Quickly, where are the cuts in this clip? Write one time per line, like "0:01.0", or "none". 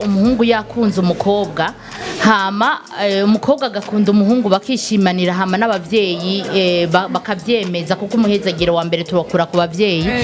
none